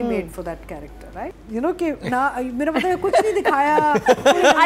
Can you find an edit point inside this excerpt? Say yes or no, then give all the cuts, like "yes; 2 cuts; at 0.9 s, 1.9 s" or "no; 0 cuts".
yes; 1 cut; at 1.4 s